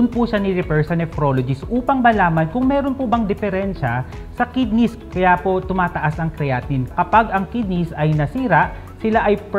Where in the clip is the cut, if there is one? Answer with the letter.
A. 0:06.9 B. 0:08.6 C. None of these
A